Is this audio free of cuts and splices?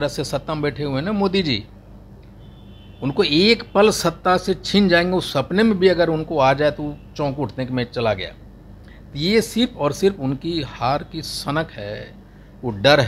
yes; 0 cuts

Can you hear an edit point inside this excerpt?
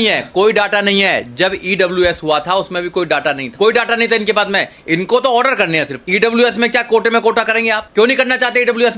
yes; 3 cuts; at 3.5 s, 6.0 s, 7.8 s

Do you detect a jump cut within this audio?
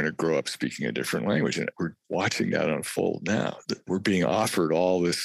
yes; 2 cuts; at 1.7 s, 3.9 s

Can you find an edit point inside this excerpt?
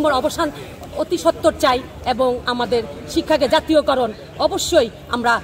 no; 0 cuts

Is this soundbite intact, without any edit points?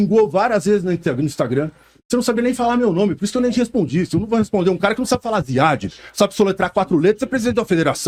yes; 0 cuts

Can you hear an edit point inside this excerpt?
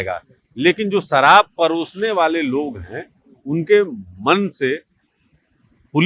no; 0 cuts

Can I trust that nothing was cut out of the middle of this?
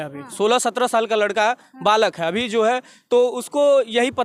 yes; 0 cuts

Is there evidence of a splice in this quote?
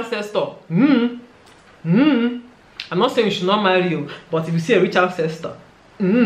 no; 0 cuts

